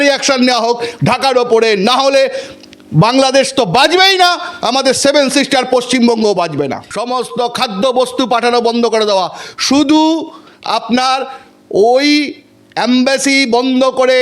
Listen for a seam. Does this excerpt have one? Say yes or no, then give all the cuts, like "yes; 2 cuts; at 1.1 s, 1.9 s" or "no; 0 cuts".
yes; 1 cut; at 6.9 s